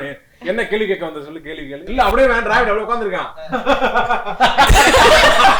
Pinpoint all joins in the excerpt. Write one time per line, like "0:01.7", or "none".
0:01.9